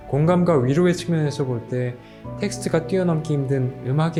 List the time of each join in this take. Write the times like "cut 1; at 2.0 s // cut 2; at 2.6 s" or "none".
none